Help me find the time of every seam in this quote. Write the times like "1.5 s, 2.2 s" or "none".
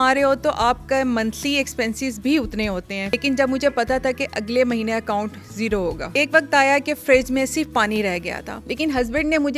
3.0 s, 6.1 s, 8.5 s